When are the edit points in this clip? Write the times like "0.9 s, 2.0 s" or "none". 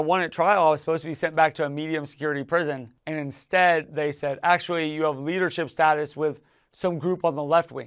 2.9 s